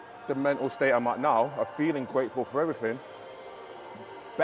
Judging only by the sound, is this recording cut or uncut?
uncut